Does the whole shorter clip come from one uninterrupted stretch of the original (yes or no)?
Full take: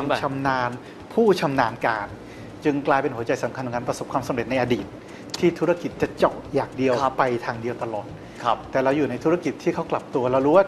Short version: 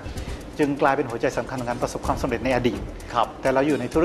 no